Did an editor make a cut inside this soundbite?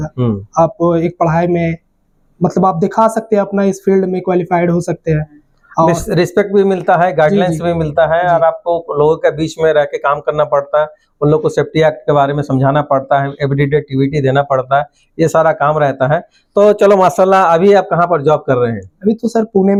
no; 0 cuts

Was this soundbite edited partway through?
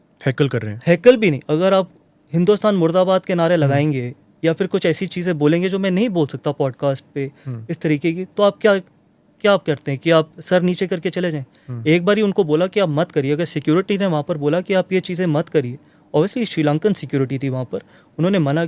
no; 0 cuts

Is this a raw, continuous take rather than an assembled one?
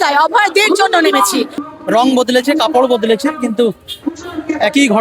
no; 1 cut; at 1.6 s

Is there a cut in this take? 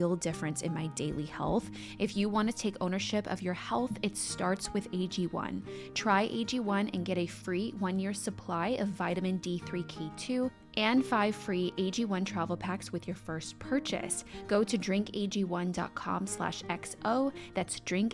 yes; 1 cut; at 1.8 s

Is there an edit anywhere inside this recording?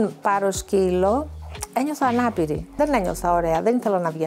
yes; 1 cut; at 2.8 s

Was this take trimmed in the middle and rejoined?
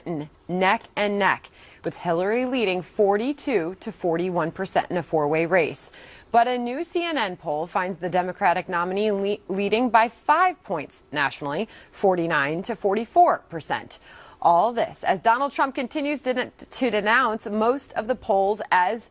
yes; 1 cut; at 13.1 s

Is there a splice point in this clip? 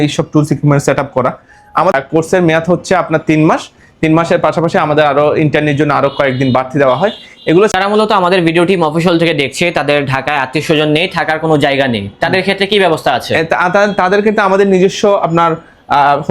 yes; 2 cuts; at 1.9 s, 7.8 s

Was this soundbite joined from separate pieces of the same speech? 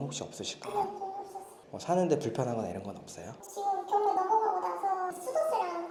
no; 0 cuts

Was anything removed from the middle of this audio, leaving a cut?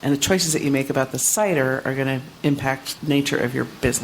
yes; 1 cut; at 2.9 s

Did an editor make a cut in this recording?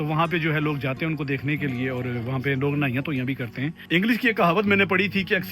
yes; 1 cut; at 3.8 s

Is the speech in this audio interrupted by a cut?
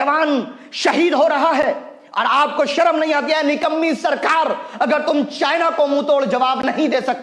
no; 0 cuts

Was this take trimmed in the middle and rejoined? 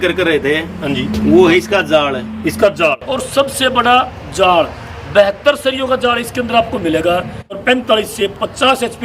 yes; 2 cuts; at 3.0 s, 7.6 s

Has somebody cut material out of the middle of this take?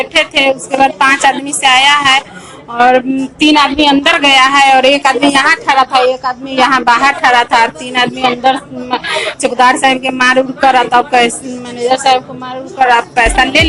no; 0 cuts

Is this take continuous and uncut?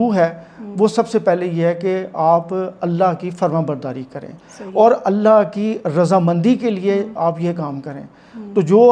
yes; 0 cuts

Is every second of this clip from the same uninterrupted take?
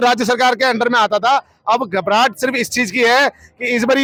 yes; 0 cuts

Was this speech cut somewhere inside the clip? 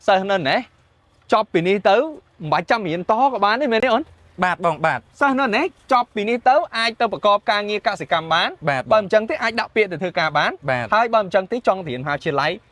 no; 0 cuts

